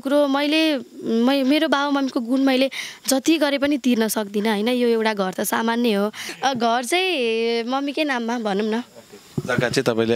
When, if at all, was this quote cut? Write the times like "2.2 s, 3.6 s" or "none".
6.3 s

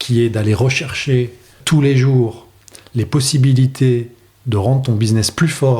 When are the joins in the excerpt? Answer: 1.6 s

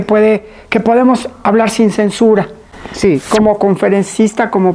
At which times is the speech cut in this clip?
3.2 s

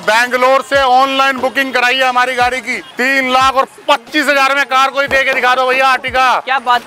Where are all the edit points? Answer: 2.9 s

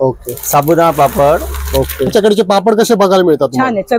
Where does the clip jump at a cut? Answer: 2.1 s

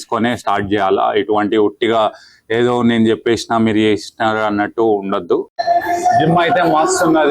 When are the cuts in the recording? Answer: 5.6 s

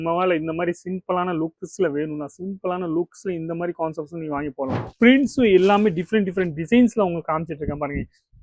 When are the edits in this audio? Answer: 4.8 s

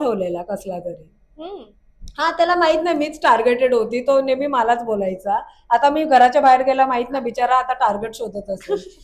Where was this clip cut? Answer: none

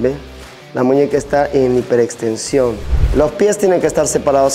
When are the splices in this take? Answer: 2.9 s

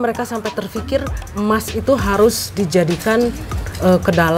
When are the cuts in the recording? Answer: none

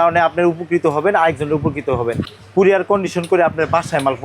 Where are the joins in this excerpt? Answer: 2.2 s

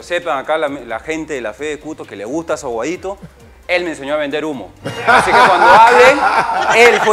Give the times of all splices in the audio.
none

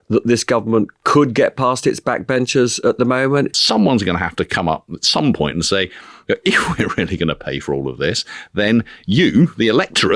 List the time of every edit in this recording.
3.6 s

